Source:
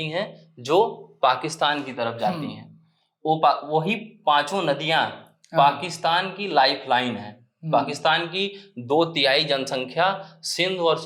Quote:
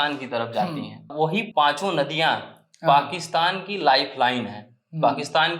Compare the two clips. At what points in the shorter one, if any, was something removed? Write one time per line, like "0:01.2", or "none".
0:01.4